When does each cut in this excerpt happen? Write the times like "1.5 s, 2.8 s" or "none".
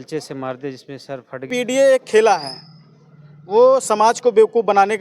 1.5 s